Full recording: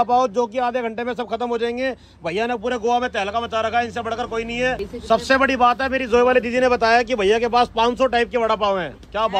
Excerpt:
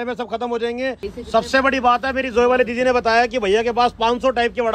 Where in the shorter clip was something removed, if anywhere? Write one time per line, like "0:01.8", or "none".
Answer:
0:01.1